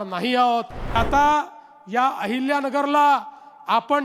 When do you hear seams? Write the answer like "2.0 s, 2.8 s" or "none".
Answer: 1.0 s